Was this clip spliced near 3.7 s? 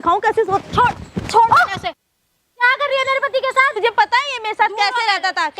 yes; 1 cut; at 3.7 s

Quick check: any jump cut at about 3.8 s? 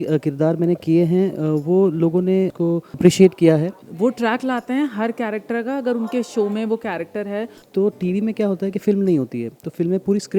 yes; 2 cuts; at 3.8 s, 7.6 s

